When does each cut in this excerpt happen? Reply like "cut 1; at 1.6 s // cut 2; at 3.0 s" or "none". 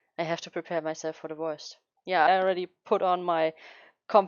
cut 1; at 2.3 s

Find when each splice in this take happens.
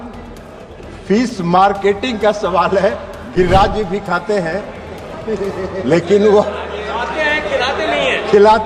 none

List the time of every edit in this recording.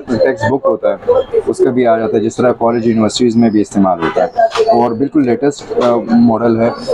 none

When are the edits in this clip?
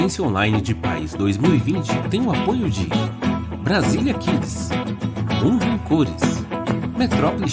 none

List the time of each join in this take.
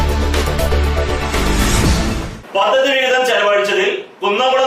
cut 1; at 2.3 s

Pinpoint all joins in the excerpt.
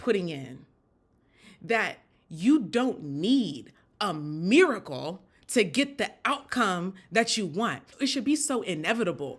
cut 1; at 7.9 s

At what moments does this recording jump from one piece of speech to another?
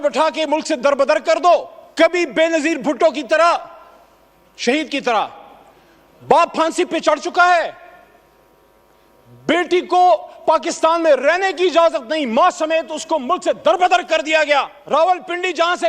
cut 1; at 1.8 s // cut 2; at 14.8 s

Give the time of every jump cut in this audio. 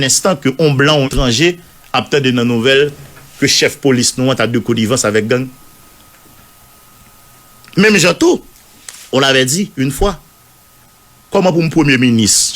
cut 1; at 1.1 s

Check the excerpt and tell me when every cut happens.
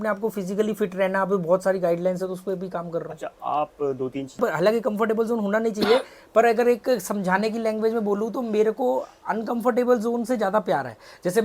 cut 1; at 4.4 s

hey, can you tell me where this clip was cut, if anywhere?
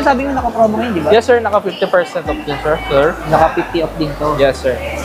cut 1; at 3.2 s

